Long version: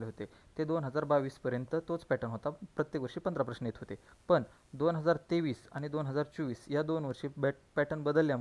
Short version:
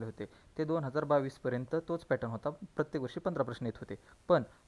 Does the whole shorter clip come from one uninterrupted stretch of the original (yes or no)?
yes